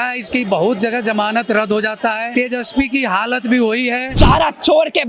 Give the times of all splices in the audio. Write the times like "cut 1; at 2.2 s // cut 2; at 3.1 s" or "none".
cut 1; at 2.3 s // cut 2; at 4.1 s